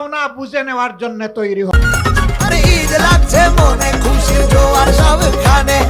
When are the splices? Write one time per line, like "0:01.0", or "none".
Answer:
0:01.7